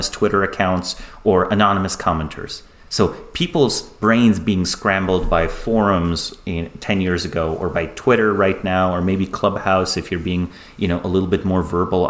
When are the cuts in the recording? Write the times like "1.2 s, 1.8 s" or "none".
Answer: none